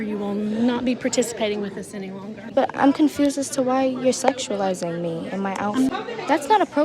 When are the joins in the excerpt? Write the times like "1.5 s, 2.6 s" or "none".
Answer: 2.5 s, 5.9 s